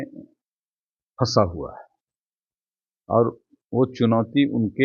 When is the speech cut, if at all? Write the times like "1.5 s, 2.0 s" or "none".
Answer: none